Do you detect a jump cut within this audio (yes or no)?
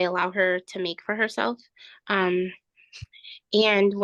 no